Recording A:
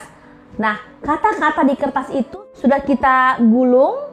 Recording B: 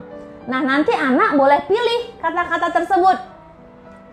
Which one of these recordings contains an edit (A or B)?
A